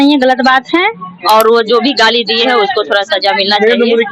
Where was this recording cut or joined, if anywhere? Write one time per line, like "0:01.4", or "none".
0:01.1